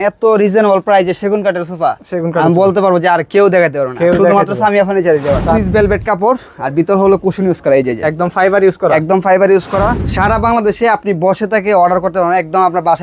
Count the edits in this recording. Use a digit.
2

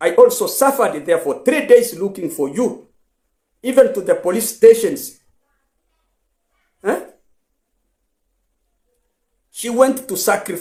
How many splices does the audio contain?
0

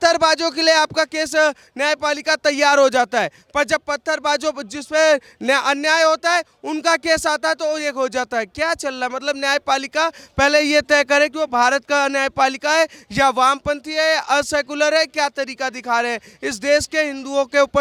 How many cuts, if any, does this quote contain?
0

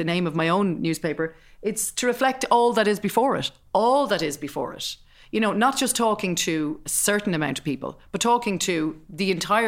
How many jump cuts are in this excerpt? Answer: 0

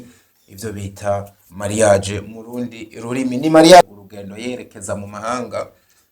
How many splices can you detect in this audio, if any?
1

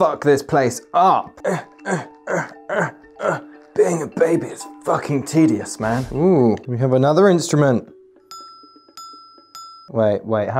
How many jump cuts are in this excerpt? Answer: 1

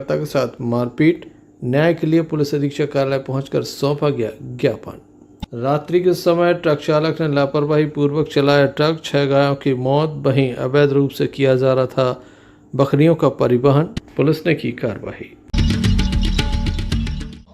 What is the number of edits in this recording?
2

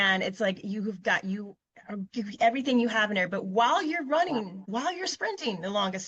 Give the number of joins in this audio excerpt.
1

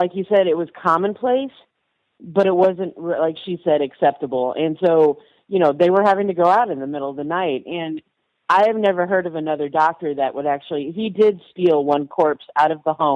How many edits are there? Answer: 0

